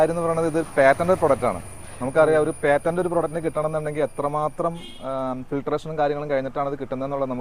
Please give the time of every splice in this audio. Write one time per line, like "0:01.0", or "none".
none